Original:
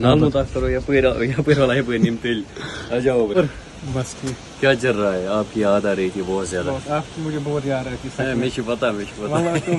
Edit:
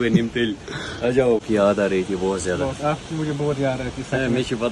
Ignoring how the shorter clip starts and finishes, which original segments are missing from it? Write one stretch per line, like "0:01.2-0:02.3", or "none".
0:03.3-0:05.5